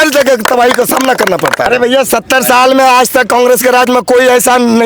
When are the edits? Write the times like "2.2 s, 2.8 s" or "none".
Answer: 1.6 s

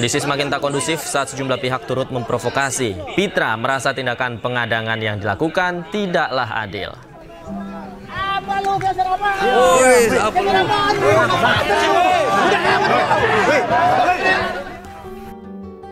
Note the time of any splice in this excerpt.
none

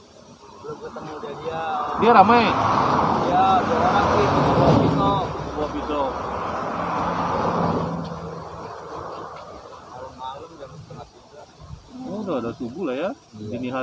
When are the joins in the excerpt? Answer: none

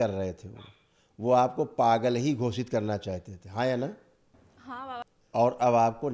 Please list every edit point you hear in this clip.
5.1 s

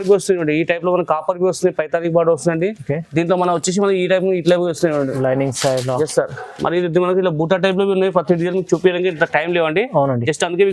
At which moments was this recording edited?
none

